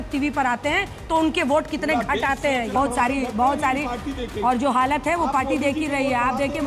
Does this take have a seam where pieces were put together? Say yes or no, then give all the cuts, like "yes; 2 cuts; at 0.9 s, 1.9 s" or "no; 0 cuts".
yes; 1 cut; at 2.7 s